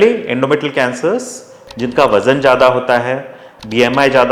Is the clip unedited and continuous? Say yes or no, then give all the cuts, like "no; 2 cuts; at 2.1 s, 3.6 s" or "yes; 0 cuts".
no; 2 cuts; at 1.6 s, 3.4 s